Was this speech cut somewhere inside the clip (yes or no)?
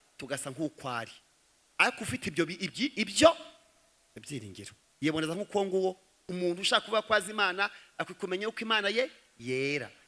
yes